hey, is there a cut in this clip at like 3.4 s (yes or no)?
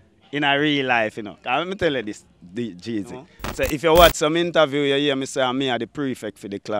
yes